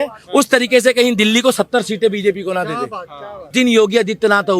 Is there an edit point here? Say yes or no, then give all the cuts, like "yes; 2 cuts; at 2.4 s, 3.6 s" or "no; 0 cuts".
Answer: yes; 1 cut; at 3.5 s